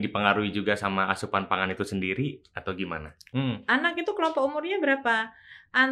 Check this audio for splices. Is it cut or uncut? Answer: cut